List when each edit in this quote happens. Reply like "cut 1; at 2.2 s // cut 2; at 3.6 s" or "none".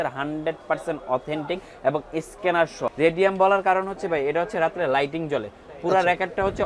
cut 1; at 2.9 s